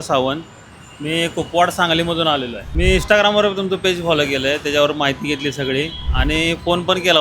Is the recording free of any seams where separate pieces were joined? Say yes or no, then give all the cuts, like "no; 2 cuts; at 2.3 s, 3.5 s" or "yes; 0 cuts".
no; 1 cut; at 2.6 s